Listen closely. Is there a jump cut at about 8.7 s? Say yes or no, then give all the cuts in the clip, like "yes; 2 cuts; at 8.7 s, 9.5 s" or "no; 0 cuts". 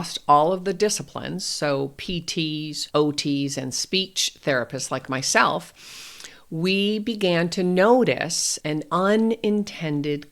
yes; 2 cuts; at 2.8 s, 8.7 s